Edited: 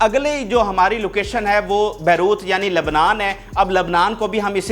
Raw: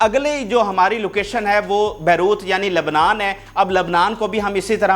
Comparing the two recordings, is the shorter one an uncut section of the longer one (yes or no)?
yes